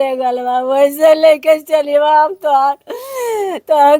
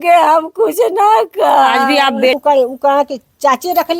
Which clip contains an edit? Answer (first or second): second